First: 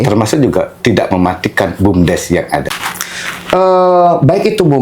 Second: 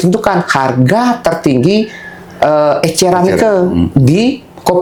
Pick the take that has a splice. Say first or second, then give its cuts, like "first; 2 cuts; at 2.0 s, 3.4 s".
first; 1 cut; at 2.7 s